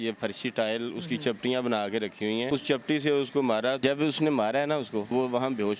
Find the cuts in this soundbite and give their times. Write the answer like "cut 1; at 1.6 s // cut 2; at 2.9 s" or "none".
cut 1; at 2.5 s // cut 2; at 3.8 s // cut 3; at 5.1 s